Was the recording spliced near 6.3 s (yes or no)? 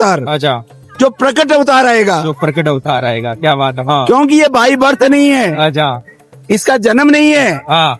no